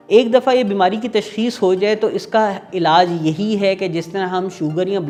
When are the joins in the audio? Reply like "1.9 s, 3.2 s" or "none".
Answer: none